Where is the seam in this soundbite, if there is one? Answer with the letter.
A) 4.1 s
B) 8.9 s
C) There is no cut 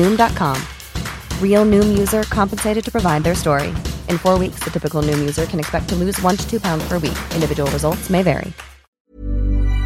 B